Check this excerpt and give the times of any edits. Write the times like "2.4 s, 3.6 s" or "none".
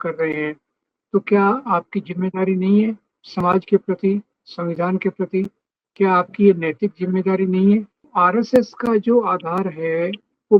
8.0 s